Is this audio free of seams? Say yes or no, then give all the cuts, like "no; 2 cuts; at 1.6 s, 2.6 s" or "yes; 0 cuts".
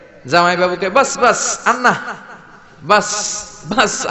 yes; 0 cuts